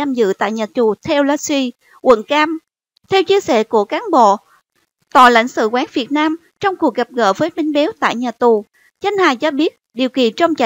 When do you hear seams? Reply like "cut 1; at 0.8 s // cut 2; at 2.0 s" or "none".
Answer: cut 1; at 3.7 s